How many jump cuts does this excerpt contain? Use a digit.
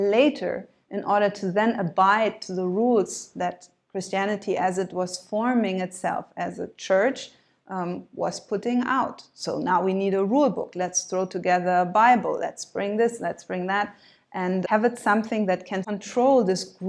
2